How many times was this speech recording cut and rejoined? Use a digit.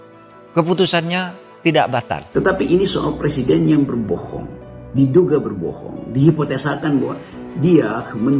1